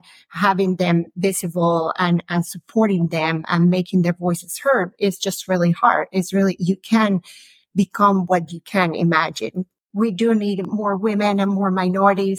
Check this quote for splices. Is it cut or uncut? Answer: cut